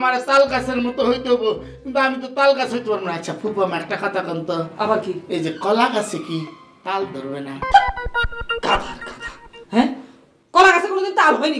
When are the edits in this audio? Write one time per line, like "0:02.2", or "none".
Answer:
none